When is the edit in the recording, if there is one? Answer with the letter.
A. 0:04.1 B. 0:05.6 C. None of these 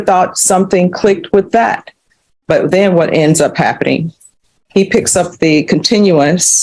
C